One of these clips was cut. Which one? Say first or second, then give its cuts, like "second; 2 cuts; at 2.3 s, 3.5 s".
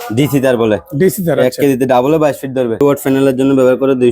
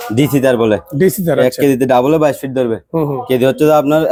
first; 1 cut; at 2.8 s